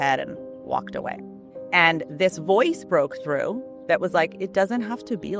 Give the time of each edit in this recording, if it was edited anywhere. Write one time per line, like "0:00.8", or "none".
none